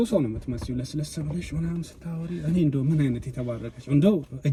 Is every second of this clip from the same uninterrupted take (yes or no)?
yes